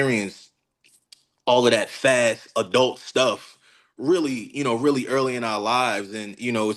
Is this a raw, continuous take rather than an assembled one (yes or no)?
yes